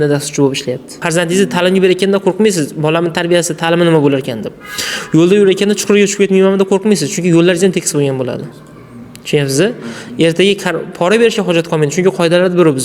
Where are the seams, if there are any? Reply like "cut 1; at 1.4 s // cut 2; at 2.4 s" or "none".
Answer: cut 1; at 1.0 s